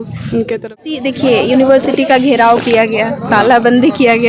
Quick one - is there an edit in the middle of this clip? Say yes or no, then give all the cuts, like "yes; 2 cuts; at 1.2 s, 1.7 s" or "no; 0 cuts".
yes; 1 cut; at 0.9 s